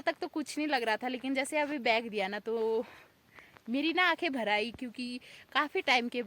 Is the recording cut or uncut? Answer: uncut